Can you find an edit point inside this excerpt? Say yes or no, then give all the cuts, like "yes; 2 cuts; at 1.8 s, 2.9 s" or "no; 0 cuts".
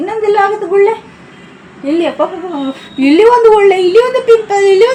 no; 0 cuts